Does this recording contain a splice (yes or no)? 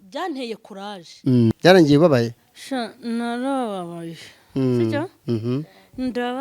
yes